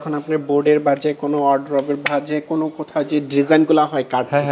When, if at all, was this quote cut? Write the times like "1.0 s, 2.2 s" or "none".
none